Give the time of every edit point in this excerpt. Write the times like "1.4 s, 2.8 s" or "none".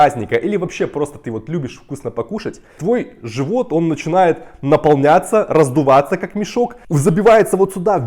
2.8 s, 6.8 s